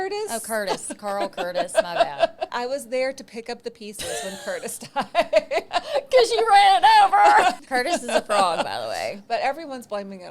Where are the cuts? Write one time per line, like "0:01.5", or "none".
0:02.5
0:05.7
0:07.6